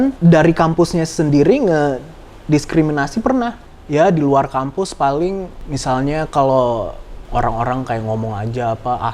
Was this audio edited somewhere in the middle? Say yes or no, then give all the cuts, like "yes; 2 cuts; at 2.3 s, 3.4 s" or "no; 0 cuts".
yes; 1 cut; at 3.7 s